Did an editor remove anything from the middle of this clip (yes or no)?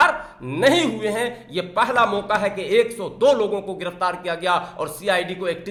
no